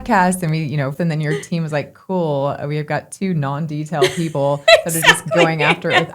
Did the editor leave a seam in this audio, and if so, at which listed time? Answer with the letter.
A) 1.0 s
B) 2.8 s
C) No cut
A